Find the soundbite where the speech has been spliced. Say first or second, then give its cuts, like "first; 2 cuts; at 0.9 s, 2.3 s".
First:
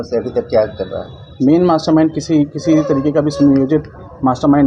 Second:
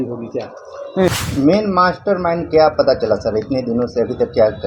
second; 1 cut; at 1.1 s